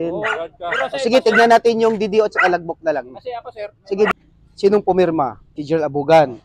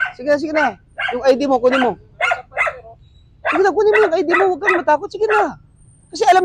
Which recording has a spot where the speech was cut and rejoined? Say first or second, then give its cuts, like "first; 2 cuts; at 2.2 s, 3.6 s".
first; 1 cut; at 4.1 s